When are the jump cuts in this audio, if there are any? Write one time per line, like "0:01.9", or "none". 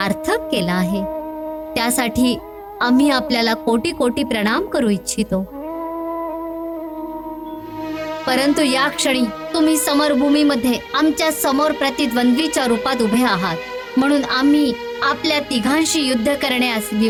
none